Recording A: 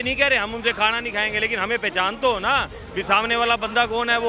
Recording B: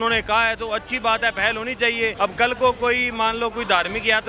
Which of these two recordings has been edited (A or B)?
B